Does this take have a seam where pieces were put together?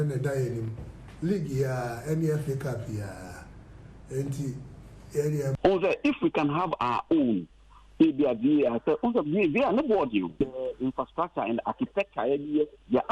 yes; 1 cut; at 5.6 s

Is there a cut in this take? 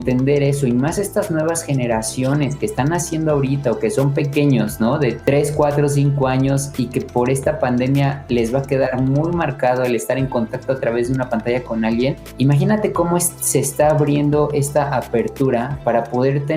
yes; 2 cuts; at 5.2 s, 12.2 s

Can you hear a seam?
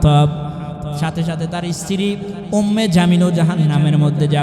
no; 0 cuts

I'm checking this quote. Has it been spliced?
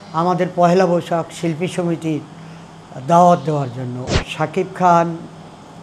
yes; 1 cut; at 4.0 s

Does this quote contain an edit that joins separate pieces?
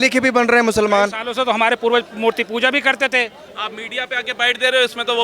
yes; 1 cut; at 3.4 s

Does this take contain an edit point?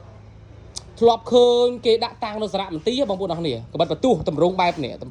no; 0 cuts

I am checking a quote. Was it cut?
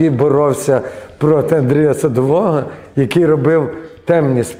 no; 0 cuts

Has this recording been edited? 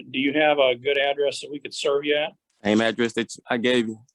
yes; 1 cut; at 2.4 s

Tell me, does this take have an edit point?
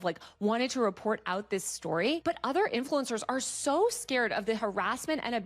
no; 0 cuts

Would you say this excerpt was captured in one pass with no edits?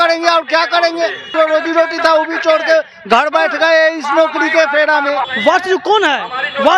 no; 2 cuts; at 1.3 s, 5.3 s

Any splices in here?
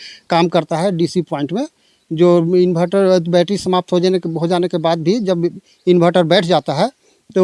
no; 0 cuts

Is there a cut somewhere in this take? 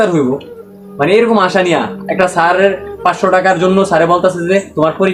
no; 0 cuts

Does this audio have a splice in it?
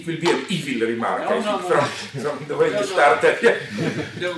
yes; 1 cut; at 3.2 s

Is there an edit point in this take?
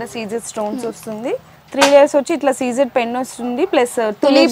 yes; 1 cut; at 1.6 s

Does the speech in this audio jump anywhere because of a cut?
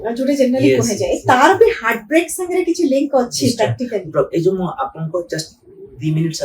no; 0 cuts

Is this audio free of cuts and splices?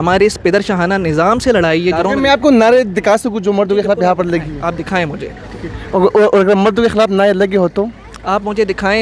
no; 1 cut; at 2.0 s

